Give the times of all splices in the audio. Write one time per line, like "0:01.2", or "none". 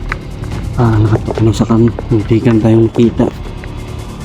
0:00.8
0:03.3